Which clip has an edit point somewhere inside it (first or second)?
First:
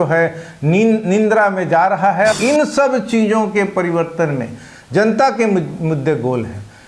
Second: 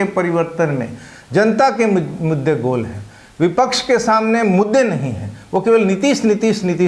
first